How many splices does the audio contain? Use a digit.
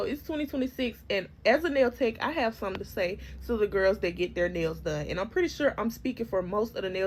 0